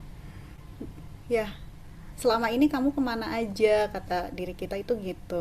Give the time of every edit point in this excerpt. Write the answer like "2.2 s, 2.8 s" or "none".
none